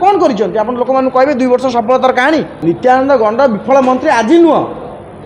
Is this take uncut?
no; 1 cut; at 2.5 s

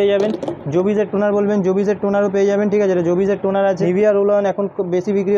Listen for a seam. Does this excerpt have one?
yes; 1 cut; at 3.8 s

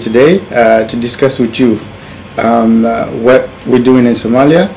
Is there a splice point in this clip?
yes; 1 cut; at 1.1 s

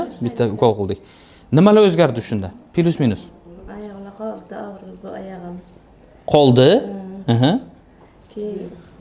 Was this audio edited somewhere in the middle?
no; 0 cuts

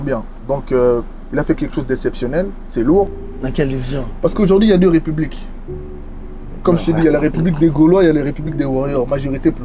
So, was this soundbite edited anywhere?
yes; 1 cut; at 3.2 s

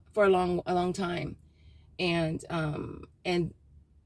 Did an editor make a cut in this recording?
no; 0 cuts

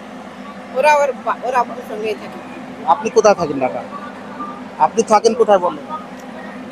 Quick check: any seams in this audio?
no; 0 cuts

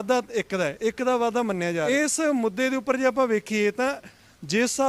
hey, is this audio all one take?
no; 1 cut; at 1.9 s

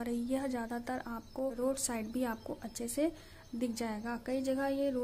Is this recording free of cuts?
no; 1 cut; at 1.5 s

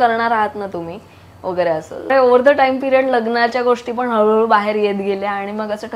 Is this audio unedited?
no; 1 cut; at 2.0 s

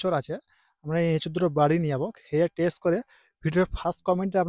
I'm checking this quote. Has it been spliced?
no; 0 cuts

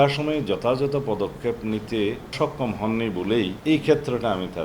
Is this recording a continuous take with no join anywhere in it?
no; 1 cut; at 2.3 s

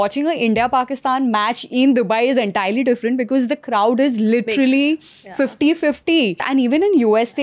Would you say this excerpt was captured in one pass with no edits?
no; 1 cut; at 6.4 s

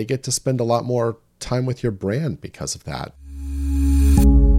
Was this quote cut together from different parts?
yes; 1 cut; at 3.1 s

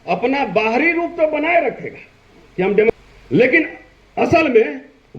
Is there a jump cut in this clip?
yes; 1 cut; at 2.9 s

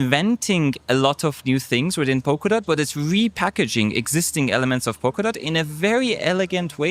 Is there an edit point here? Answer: no; 0 cuts

